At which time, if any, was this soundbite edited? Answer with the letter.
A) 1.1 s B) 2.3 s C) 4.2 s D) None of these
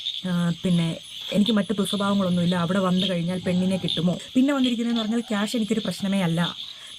C